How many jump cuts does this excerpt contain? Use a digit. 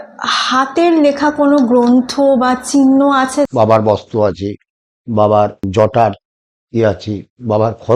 2